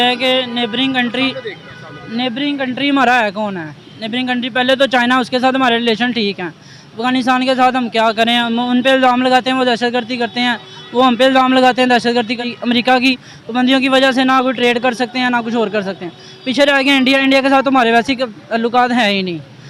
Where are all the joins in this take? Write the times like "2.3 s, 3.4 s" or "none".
12.5 s